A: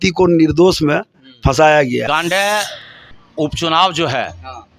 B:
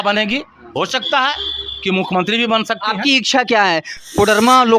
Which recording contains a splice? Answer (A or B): A